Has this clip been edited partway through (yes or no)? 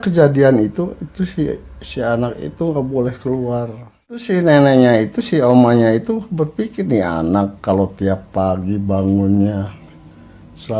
yes